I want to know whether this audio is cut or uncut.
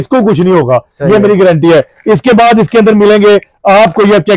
uncut